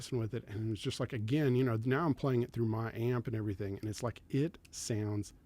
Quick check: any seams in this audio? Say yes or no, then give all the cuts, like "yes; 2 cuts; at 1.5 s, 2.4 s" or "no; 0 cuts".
no; 0 cuts